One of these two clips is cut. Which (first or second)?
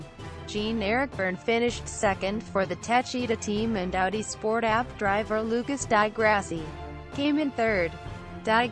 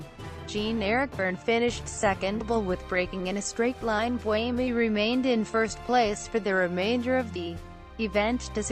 first